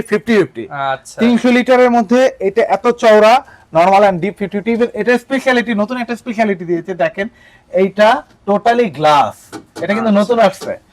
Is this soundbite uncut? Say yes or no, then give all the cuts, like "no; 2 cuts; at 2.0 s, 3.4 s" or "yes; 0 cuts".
yes; 0 cuts